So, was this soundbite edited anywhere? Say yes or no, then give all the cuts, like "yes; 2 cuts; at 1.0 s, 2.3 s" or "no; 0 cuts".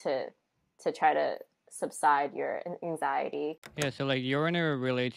yes; 1 cut; at 3.6 s